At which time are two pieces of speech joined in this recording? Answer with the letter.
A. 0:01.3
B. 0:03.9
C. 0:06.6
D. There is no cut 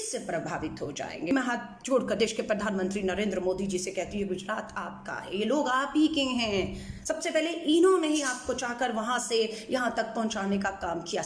A